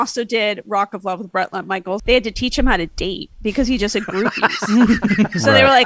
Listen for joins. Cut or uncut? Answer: cut